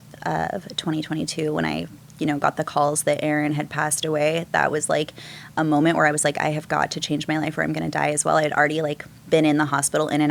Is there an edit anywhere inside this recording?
no; 0 cuts

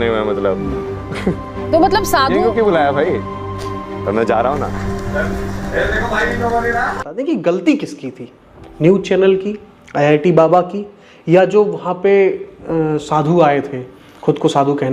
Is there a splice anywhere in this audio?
yes; 1 cut; at 7.0 s

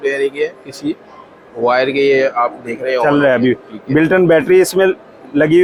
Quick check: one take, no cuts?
yes; 0 cuts

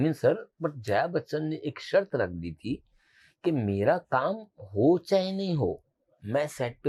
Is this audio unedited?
yes; 0 cuts

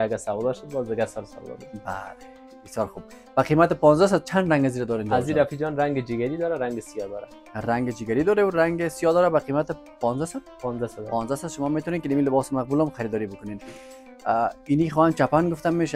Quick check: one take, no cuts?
yes; 0 cuts

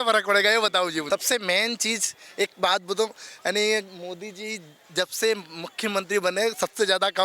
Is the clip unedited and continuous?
no; 1 cut; at 1.1 s

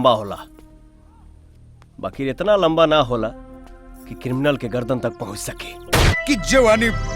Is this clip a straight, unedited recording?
no; 1 cut; at 6.1 s

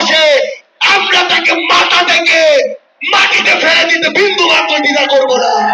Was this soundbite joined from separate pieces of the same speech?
no; 0 cuts

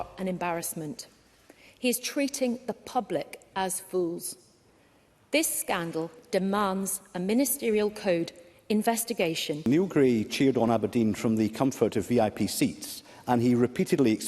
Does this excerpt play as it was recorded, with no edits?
no; 1 cut; at 9.6 s

